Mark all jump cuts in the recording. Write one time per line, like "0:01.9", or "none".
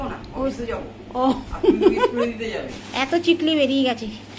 0:02.8